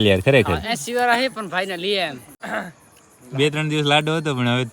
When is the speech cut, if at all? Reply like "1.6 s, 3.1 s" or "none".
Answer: 2.4 s